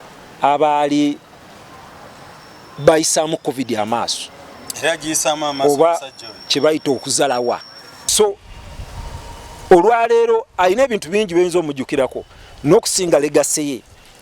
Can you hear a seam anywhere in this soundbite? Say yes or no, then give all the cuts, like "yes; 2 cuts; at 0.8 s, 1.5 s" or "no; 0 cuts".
yes; 1 cut; at 8.1 s